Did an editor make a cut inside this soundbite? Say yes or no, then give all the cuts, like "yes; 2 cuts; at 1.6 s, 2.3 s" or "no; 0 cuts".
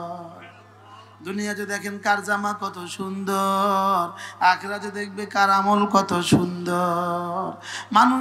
no; 0 cuts